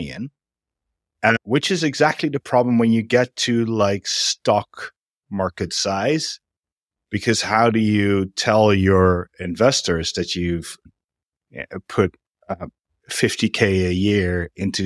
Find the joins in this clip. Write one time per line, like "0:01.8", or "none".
0:01.4
0:10.9